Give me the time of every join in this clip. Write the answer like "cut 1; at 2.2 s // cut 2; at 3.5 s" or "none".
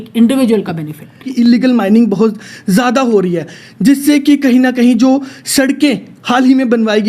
cut 1; at 1.3 s